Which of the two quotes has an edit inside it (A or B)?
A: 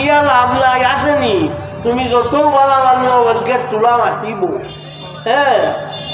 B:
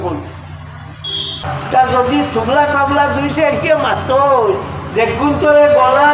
B